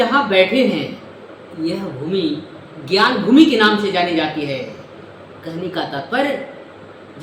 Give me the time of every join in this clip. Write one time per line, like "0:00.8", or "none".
none